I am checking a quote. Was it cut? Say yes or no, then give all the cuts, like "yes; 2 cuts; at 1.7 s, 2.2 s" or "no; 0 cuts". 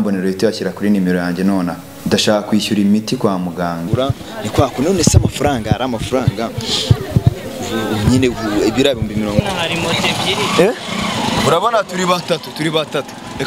yes; 3 cuts; at 1.9 s, 3.8 s, 9.4 s